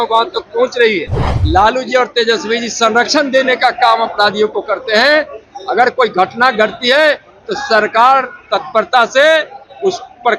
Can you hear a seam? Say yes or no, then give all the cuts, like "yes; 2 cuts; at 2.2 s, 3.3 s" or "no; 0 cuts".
yes; 1 cut; at 1.3 s